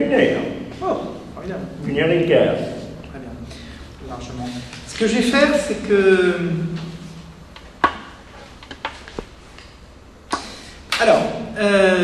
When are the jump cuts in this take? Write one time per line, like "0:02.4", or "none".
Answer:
0:10.6

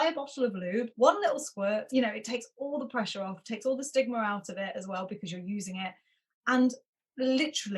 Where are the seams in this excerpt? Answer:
0:00.9
0:01.9

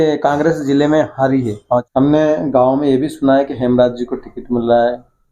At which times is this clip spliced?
0:01.9

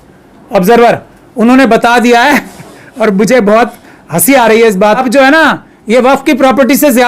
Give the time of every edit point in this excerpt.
0:05.0

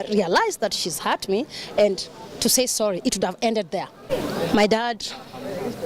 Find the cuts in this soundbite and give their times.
0:04.1

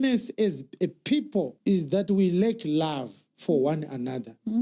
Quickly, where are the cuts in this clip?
0:01.5

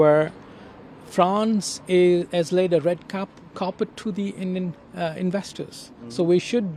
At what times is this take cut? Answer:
none

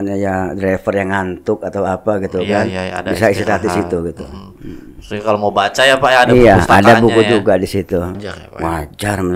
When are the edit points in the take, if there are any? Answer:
0:08.2

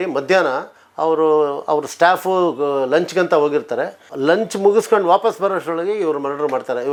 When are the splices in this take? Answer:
none

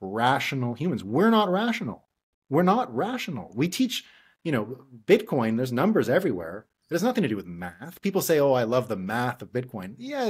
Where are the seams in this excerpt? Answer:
none

